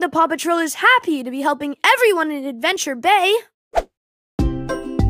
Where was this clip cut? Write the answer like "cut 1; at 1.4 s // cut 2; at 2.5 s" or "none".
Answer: cut 1; at 3.8 s